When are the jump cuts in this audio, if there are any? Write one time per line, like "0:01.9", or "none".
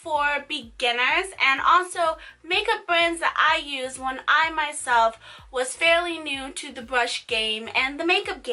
0:04.4